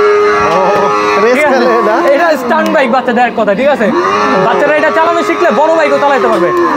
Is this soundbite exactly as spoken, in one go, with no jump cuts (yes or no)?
yes